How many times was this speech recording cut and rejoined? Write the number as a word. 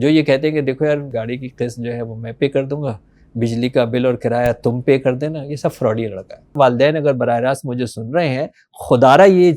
two